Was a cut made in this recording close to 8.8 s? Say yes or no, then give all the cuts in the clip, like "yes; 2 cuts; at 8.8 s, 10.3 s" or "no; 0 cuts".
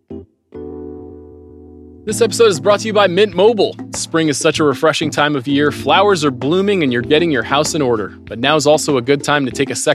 no; 1 cut; at 1.9 s